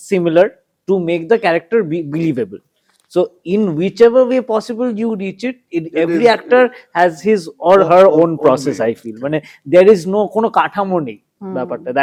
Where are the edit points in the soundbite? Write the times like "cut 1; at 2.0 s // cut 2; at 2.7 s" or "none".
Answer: none